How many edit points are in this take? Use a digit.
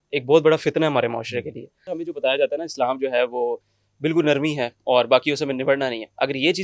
1